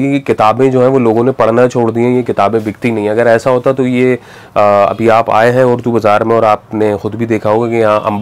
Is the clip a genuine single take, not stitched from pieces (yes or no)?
yes